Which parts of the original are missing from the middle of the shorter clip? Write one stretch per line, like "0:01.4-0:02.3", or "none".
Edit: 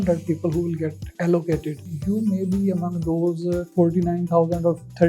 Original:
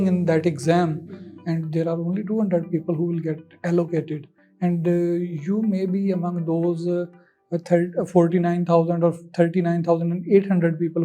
0:04.4-0:05.3
0:07.1-0:08.1

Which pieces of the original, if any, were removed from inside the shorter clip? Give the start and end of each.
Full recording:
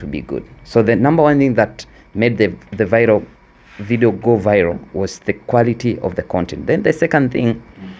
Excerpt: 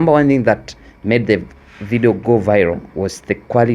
0:02.6-0:03.5

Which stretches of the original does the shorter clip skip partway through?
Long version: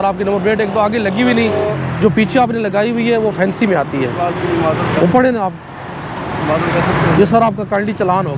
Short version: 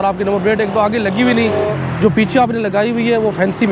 none

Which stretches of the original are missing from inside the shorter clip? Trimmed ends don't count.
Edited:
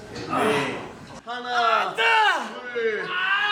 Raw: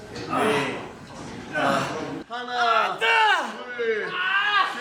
0:01.2-0:02.3

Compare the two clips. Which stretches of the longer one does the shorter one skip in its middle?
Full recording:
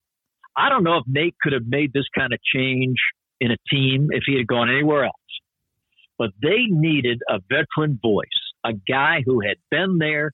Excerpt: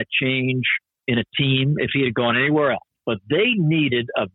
0:05.2-0:06.0

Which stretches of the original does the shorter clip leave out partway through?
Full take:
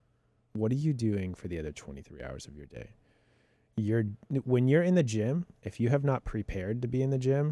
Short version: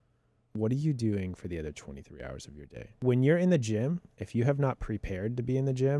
0:03.0-0:04.4

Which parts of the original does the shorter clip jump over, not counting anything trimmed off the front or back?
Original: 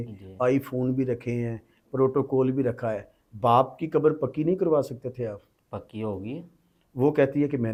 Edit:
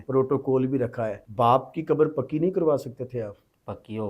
0:03.0-0:03.2

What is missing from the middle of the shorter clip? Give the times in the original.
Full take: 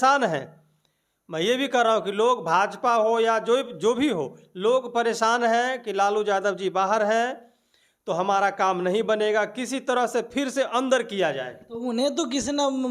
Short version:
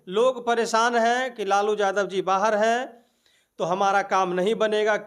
none

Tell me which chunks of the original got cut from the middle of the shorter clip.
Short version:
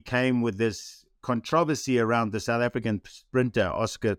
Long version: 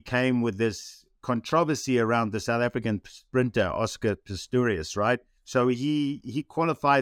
none

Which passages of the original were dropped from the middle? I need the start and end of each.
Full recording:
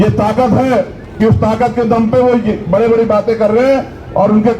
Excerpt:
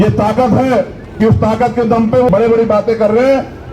0:02.3-0:02.7

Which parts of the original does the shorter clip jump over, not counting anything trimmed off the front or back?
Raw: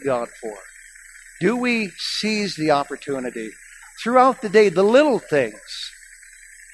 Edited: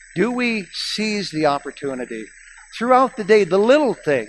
none

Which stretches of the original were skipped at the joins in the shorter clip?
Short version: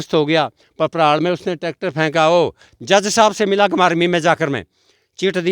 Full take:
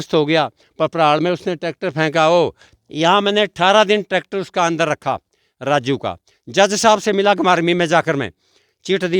0:02.7-0:06.3

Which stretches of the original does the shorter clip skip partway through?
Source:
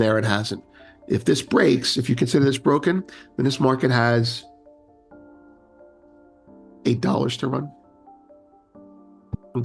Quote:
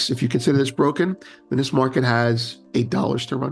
0:04.4-0:06.7

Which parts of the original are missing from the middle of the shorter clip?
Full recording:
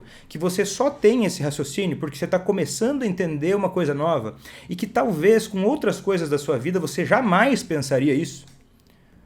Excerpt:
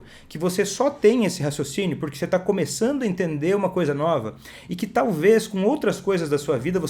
none

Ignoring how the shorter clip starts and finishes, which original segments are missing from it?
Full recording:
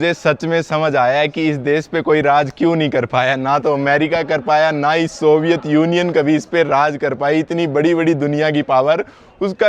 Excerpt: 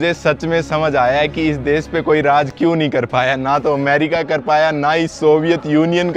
none

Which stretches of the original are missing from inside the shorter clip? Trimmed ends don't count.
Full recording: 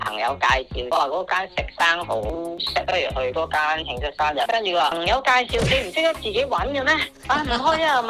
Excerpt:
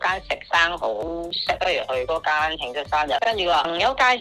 none

